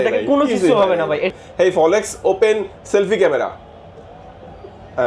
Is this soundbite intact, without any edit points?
no; 1 cut; at 1.3 s

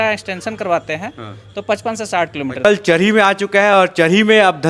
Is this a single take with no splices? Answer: no; 1 cut; at 2.6 s

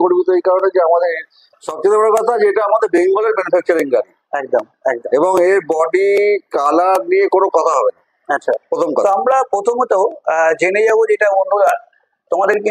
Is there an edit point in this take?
no; 0 cuts

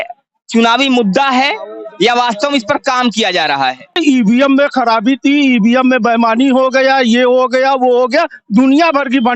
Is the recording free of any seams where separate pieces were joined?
no; 1 cut; at 4.0 s

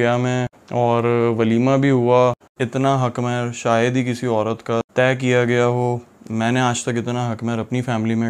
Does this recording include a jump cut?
yes; 1 cut; at 2.5 s

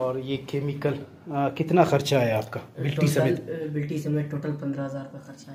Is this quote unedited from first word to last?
yes; 0 cuts

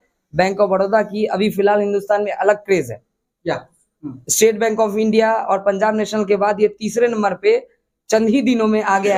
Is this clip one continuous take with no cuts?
yes; 0 cuts

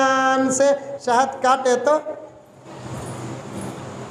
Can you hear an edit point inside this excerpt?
no; 0 cuts

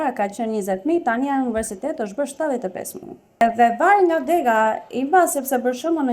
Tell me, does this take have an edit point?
yes; 1 cut; at 3.4 s

